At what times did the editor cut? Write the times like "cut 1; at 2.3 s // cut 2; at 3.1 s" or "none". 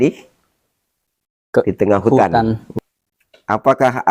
cut 1; at 2.7 s